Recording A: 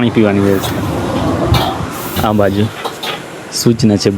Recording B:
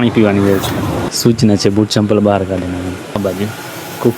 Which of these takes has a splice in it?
B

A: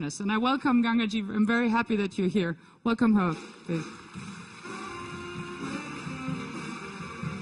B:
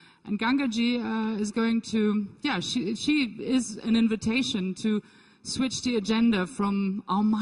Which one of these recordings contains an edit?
A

